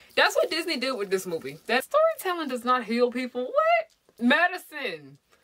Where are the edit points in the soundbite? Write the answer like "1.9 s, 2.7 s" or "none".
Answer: 1.8 s